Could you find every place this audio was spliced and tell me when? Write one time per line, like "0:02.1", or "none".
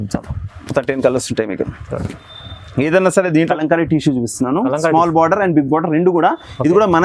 0:03.5

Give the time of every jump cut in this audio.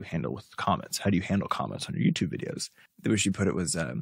0:02.8

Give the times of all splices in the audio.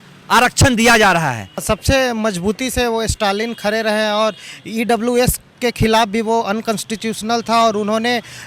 0:01.6

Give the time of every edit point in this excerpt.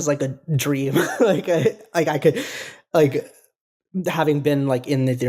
none

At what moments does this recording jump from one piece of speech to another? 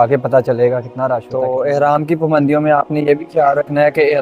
0:01.3

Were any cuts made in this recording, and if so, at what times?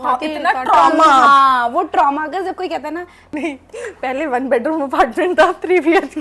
0:03.3

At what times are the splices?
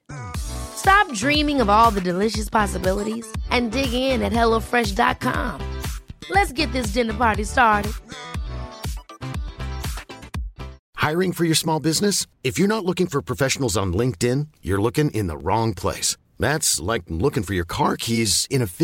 0:10.8

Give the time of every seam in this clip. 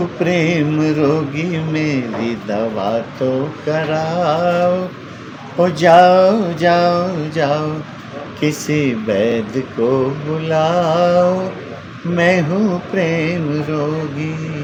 none

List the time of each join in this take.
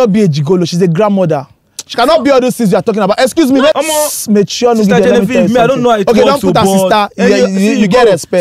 0:03.7

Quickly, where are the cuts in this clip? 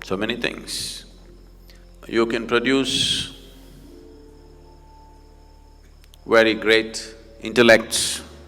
none

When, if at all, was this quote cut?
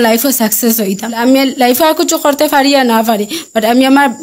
0:01.2

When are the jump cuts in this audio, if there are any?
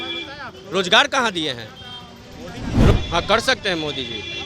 0:02.9

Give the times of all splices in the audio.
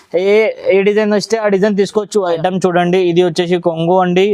0:02.4

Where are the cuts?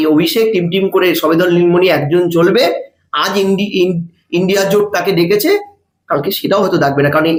none

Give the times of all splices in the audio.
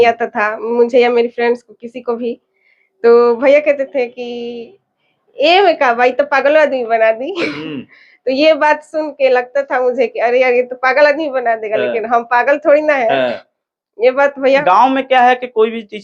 0:14.6

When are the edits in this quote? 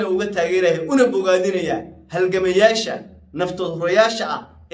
none

